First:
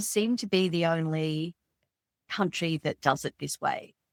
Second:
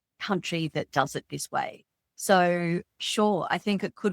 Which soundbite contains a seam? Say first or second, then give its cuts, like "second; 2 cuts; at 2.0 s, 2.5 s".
second; 1 cut; at 3.0 s